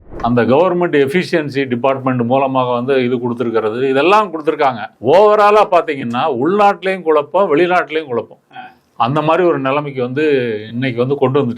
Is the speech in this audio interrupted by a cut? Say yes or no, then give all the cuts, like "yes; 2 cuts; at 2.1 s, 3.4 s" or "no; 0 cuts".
yes; 1 cut; at 4.9 s